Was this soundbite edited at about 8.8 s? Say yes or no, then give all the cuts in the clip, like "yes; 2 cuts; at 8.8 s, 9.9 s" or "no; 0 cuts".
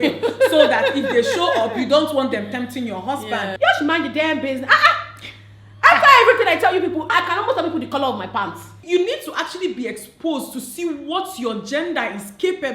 yes; 3 cuts; at 3.5 s, 7.1 s, 8.8 s